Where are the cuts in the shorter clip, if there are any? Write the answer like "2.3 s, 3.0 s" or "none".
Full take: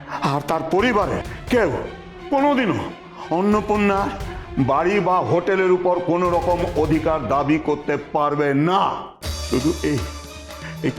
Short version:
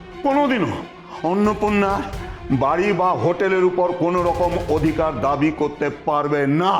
none